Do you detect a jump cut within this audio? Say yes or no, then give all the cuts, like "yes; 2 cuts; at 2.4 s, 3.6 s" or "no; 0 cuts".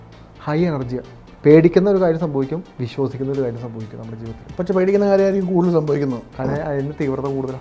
yes; 1 cut; at 1.3 s